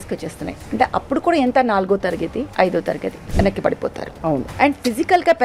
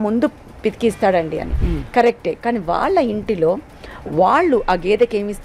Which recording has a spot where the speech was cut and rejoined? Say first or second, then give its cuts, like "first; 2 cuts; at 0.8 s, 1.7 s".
first; 3 cuts; at 2.5 s, 3.2 s, 4.5 s